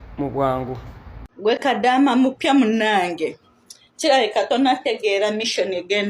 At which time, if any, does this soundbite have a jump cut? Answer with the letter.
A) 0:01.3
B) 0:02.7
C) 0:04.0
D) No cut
A